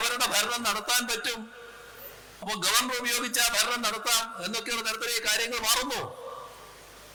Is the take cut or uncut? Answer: uncut